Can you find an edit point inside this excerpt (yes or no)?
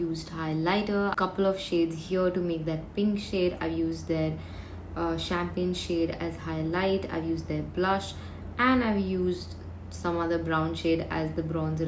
yes